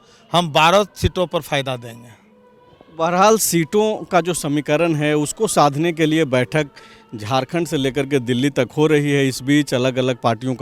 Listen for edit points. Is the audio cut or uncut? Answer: uncut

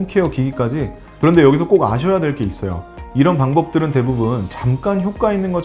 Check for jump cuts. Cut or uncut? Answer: cut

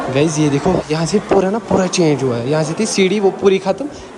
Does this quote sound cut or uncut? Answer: uncut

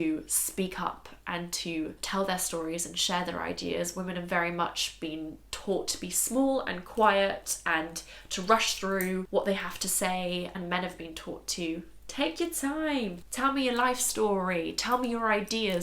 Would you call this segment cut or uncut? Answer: cut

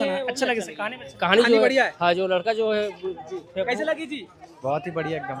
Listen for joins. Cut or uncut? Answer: uncut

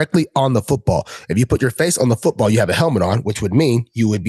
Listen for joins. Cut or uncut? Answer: uncut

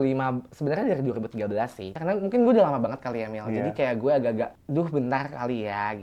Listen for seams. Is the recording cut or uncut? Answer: cut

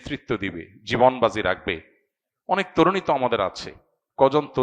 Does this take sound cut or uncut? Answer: uncut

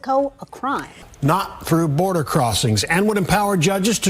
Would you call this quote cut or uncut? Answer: cut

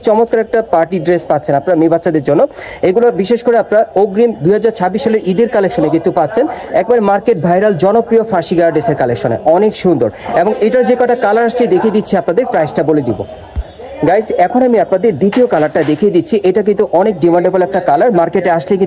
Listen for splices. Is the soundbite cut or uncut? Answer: uncut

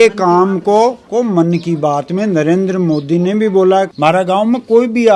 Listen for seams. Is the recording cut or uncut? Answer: cut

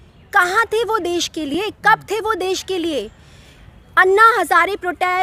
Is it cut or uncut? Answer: uncut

